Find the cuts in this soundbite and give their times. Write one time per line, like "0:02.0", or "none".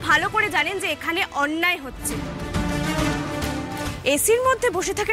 none